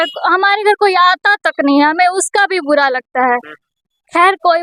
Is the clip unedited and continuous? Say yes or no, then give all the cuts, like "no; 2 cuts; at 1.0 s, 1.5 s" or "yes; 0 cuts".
yes; 0 cuts